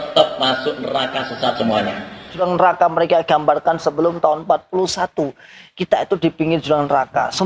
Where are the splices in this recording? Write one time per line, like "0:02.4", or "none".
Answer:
0:02.4